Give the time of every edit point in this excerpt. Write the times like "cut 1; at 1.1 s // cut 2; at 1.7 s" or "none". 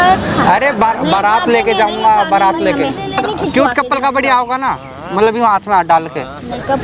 cut 1; at 3.2 s